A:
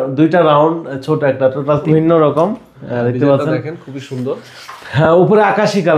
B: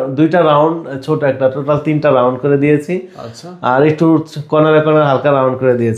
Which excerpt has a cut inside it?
A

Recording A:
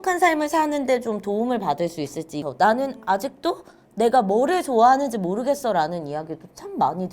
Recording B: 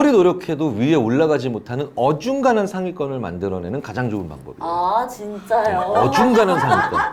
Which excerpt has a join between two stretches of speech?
A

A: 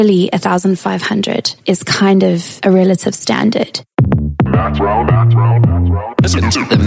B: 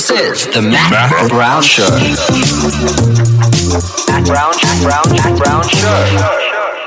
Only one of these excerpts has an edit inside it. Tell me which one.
A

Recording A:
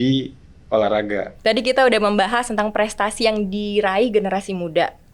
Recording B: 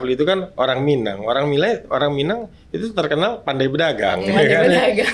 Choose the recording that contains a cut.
A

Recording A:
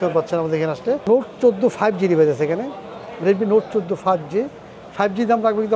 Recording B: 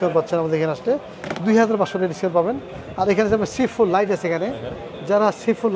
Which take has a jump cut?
A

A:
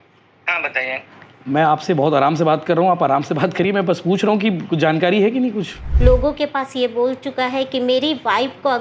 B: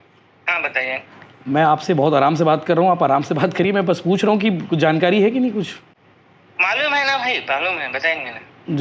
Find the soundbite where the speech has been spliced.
A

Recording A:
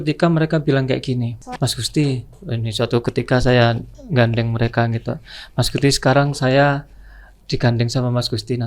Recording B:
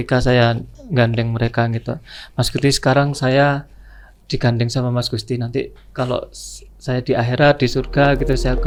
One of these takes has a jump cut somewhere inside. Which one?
A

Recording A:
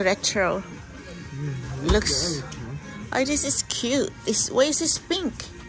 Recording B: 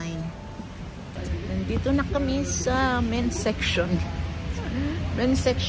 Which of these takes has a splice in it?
B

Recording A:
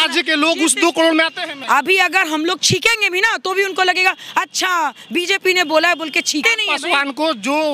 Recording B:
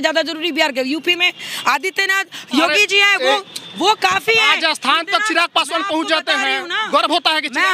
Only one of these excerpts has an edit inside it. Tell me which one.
A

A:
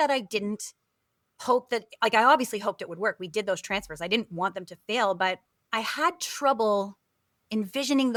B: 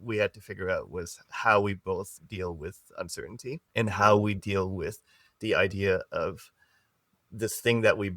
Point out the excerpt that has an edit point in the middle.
B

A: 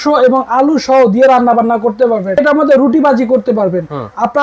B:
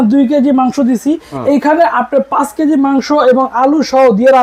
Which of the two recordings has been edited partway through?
A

